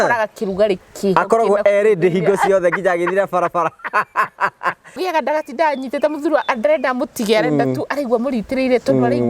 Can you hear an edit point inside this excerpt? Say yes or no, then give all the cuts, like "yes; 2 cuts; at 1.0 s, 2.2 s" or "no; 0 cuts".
yes; 1 cut; at 5.0 s